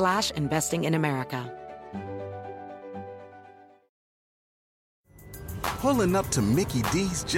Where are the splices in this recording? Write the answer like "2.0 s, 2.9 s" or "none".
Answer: 1.5 s